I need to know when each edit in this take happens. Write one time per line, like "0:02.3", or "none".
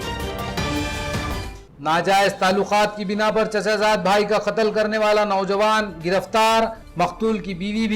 0:01.4

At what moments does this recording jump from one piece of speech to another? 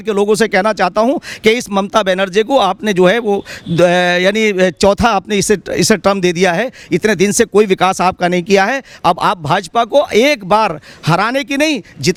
none

